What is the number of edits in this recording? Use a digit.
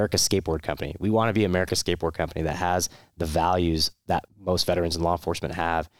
1